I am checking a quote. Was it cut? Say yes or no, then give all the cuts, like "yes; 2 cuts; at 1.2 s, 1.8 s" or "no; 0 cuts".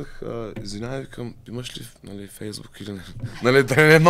no; 0 cuts